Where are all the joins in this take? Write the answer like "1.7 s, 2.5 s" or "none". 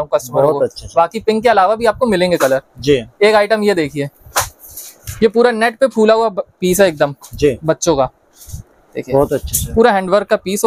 none